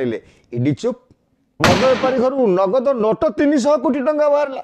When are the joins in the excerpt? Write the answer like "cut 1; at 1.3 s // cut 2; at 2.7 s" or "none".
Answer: cut 1; at 1.6 s